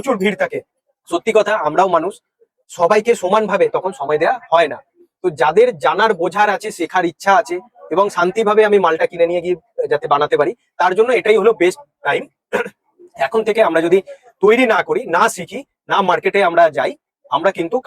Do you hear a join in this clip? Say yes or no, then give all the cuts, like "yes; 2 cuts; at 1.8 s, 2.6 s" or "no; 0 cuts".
no; 0 cuts